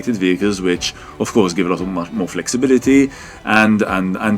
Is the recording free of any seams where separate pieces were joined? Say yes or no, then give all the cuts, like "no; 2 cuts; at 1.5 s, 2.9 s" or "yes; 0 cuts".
yes; 0 cuts